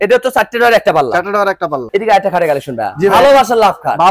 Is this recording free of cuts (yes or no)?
no